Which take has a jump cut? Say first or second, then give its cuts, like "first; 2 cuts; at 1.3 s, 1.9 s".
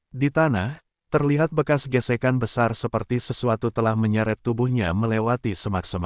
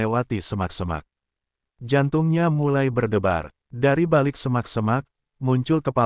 second; 1 cut; at 3.6 s